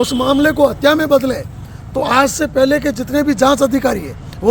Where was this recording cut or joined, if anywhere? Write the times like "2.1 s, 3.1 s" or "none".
none

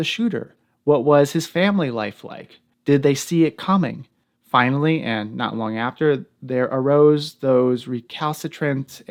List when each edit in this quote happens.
none

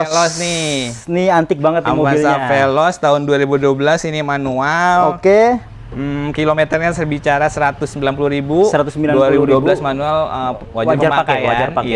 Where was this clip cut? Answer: none

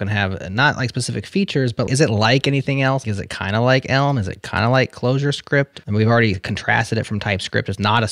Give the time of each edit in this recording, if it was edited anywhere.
1.9 s, 3.0 s, 5.8 s

